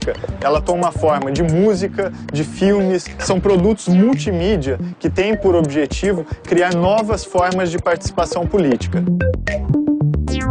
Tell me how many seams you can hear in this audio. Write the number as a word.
one